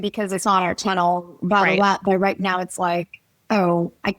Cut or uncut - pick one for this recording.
uncut